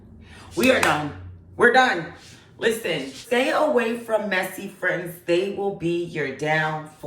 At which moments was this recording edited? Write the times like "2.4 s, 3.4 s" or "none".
3.2 s